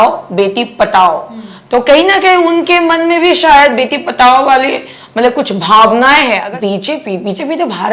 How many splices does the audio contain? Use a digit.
1